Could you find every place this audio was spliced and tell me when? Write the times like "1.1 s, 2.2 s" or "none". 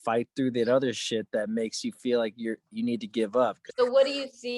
3.6 s